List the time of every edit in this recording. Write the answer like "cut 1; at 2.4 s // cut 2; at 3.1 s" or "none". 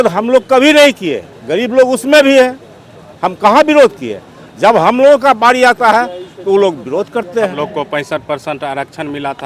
cut 1; at 7.4 s